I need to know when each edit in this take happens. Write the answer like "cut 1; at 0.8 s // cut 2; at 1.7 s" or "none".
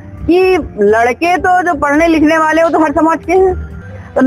none